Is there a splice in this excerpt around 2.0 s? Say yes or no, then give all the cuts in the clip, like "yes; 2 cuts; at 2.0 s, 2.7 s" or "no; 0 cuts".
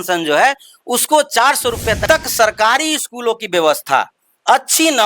yes; 1 cut; at 2.0 s